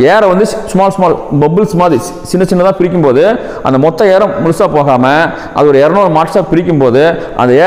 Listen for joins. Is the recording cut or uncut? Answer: uncut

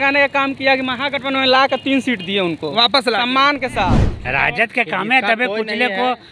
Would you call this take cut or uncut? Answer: cut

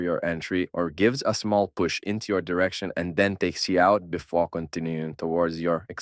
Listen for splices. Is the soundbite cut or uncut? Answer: uncut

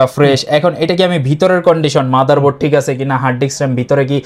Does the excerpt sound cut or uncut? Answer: uncut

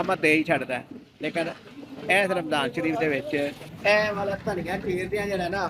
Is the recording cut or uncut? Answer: cut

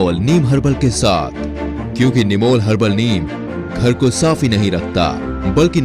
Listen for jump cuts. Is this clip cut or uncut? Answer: uncut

